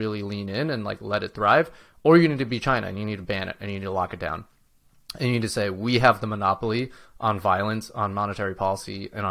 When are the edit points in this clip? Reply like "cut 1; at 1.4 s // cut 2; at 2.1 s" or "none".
none